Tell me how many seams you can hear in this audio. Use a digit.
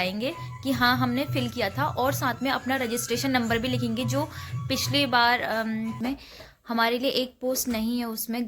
1